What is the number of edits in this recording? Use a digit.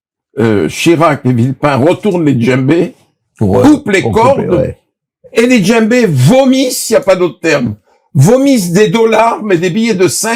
0